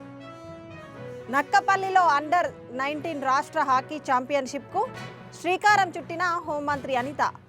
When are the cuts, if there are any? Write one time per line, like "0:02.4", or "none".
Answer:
0:01.1